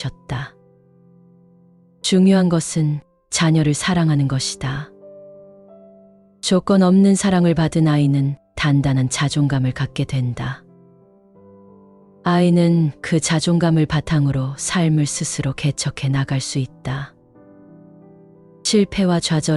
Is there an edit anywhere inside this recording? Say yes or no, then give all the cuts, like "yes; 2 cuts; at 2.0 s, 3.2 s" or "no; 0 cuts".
yes; 4 cuts; at 4.9 s, 6.4 s, 10.6 s, 12.0 s